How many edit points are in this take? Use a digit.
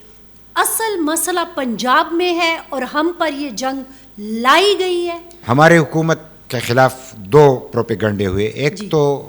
1